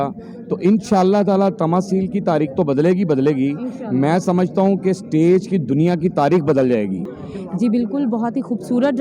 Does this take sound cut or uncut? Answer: uncut